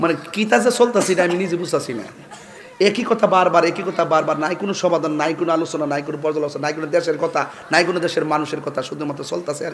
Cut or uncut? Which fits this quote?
uncut